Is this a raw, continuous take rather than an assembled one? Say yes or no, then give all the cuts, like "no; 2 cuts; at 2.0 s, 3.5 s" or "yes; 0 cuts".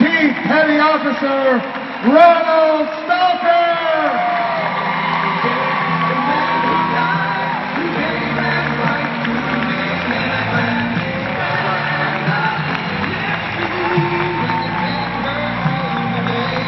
yes; 0 cuts